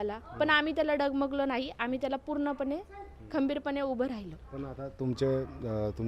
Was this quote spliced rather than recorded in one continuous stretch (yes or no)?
no